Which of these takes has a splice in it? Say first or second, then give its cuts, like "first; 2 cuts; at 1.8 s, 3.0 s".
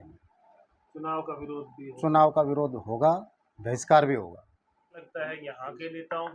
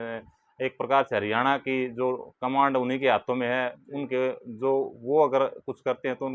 first; 1 cut; at 5.1 s